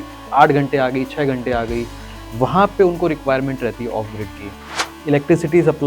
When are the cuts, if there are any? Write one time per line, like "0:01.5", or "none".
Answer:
0:04.9

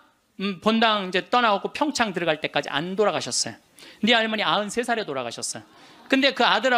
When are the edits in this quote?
none

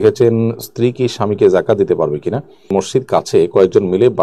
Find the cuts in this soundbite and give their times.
0:02.5

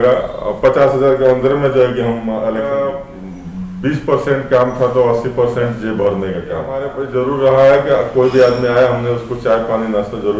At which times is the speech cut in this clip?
0:02.6
0:07.0

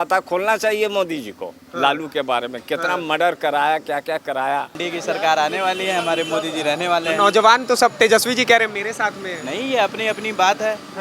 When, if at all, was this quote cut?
0:04.8

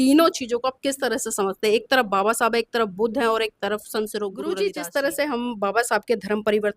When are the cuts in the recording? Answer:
0:04.6

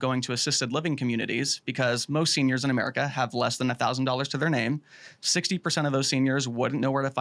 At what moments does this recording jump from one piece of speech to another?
none

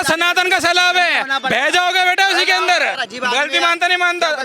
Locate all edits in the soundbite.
0:03.0

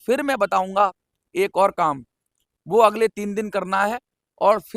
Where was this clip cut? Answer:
none

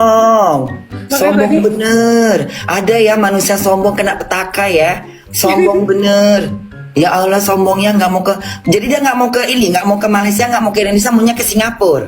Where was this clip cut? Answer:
0:01.3

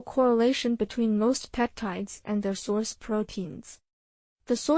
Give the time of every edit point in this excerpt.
0:02.8

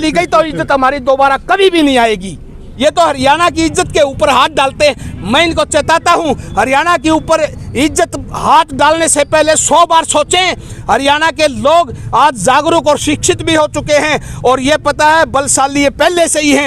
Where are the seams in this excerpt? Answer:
0:02.6

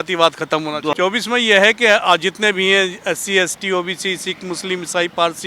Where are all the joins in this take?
0:00.9

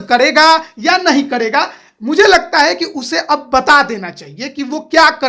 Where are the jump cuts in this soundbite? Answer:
none

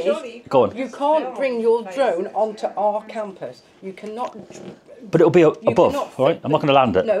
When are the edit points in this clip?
none

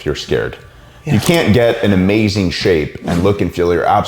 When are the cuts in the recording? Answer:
none

